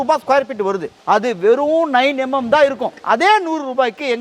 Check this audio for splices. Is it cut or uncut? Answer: cut